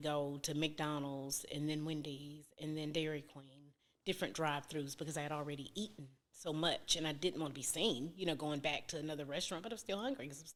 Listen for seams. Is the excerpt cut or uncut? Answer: uncut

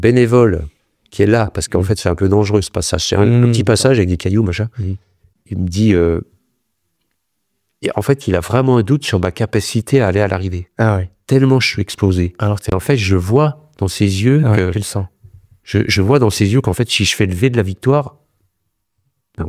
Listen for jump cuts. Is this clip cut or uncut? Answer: cut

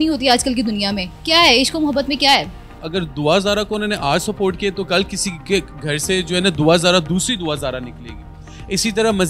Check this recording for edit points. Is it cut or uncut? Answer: cut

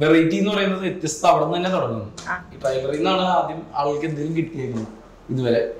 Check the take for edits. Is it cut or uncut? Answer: uncut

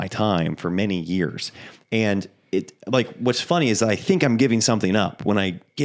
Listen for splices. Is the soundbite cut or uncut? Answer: uncut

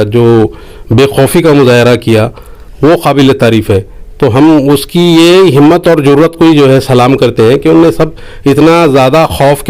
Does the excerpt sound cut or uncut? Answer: uncut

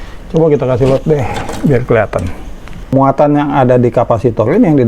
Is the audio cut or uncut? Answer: cut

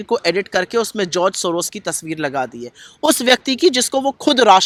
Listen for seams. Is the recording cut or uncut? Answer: uncut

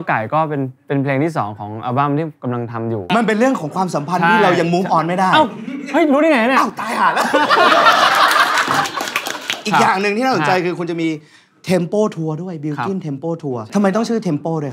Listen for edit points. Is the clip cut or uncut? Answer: cut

